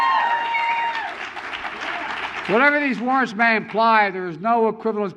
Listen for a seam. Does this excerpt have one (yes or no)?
no